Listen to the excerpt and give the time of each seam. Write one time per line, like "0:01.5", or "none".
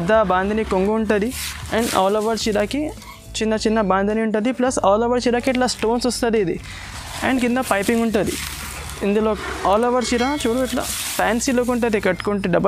none